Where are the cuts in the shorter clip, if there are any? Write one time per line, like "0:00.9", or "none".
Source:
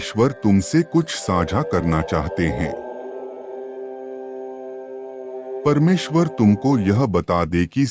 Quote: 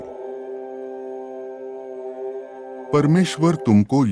none